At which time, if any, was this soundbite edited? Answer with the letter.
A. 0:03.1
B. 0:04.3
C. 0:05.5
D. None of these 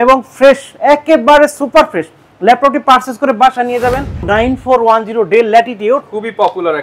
B